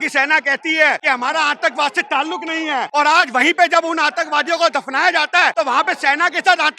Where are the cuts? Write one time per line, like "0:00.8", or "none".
0:01.0
0:02.9
0:05.5